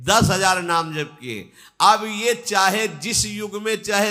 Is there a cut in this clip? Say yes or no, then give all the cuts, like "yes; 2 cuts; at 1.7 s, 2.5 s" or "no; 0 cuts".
no; 0 cuts